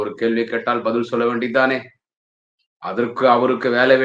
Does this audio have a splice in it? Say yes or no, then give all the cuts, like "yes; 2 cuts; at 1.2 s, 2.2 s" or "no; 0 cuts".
no; 0 cuts